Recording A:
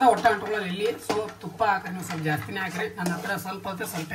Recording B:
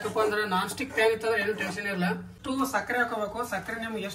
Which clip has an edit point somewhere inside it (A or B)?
B